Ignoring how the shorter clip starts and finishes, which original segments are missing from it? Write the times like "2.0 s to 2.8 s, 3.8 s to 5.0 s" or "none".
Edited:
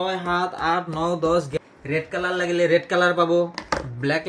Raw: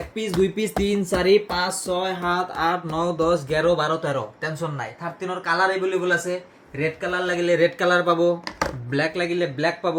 3.5 s to 6.4 s